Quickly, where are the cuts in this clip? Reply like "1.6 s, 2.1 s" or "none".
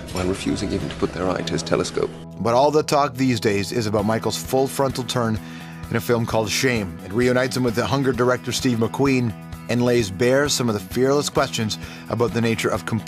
none